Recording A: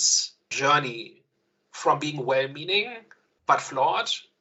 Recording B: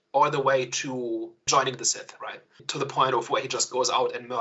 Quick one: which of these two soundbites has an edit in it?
B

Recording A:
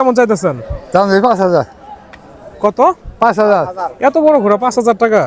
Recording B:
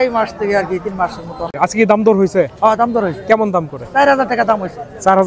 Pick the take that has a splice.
B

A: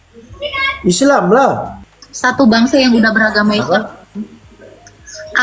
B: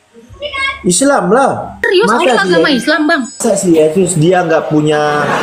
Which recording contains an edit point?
A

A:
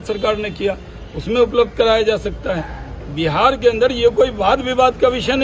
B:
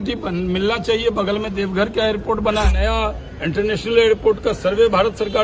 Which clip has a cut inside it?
B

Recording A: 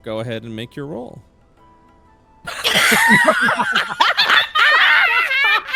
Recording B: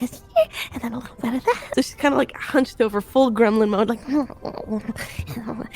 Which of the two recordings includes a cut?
B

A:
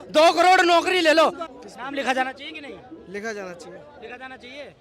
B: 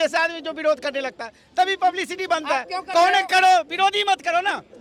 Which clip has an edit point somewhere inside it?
A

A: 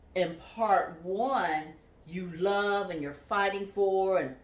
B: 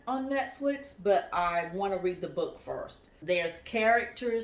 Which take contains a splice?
B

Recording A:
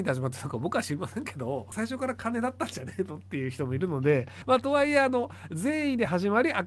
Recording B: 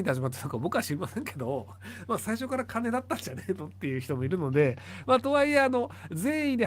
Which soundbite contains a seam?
A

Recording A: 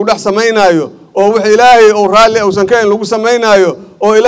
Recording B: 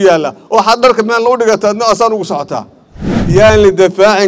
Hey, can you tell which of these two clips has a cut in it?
B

